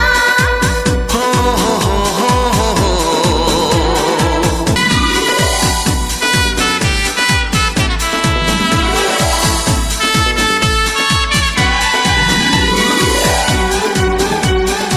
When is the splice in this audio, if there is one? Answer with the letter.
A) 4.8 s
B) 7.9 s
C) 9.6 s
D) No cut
A